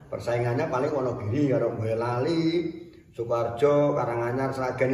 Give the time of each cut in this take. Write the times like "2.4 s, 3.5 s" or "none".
none